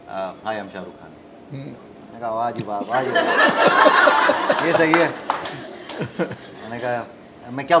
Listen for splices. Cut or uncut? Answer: uncut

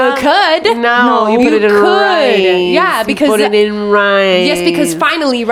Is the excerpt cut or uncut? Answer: uncut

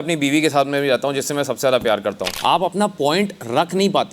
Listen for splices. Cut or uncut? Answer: cut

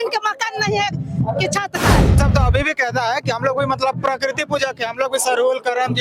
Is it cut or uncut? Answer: cut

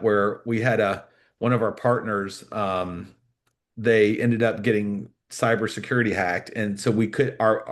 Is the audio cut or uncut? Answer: uncut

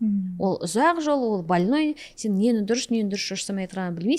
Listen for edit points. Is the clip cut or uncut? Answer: uncut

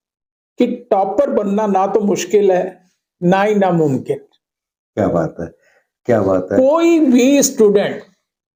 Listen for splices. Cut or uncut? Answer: uncut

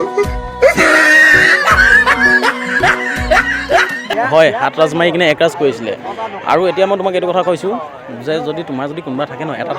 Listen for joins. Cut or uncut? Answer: cut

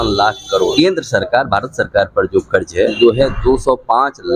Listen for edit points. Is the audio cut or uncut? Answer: cut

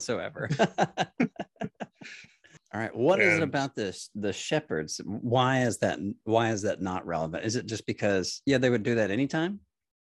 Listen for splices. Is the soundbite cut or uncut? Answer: cut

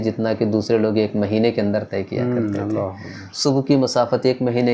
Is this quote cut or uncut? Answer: uncut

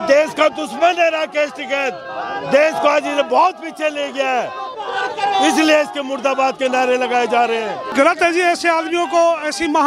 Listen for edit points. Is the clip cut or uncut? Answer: cut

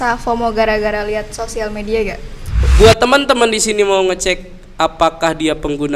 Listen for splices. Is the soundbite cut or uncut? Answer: cut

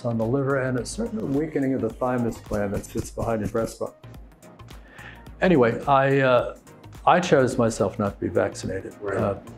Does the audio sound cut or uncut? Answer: uncut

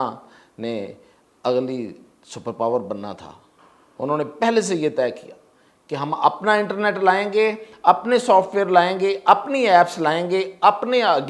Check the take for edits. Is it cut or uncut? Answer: uncut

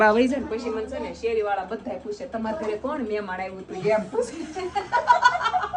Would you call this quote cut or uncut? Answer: uncut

